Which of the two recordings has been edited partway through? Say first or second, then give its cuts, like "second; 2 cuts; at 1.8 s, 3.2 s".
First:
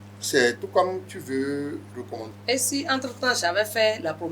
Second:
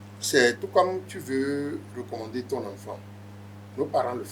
first; 1 cut; at 2.3 s